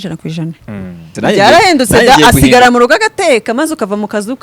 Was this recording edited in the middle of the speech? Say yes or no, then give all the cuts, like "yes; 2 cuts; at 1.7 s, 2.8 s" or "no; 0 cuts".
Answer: yes; 1 cut; at 1.1 s